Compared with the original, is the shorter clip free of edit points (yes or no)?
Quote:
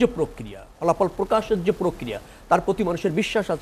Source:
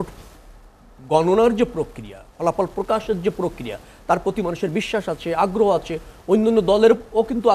yes